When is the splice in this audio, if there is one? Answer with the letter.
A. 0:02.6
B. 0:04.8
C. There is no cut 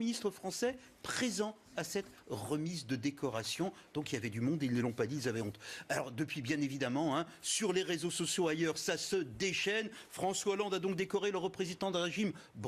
C